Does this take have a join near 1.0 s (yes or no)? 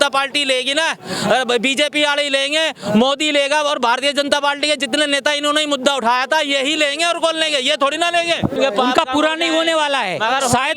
no